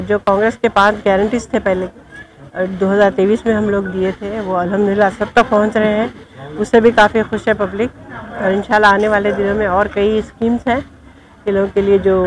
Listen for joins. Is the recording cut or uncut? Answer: uncut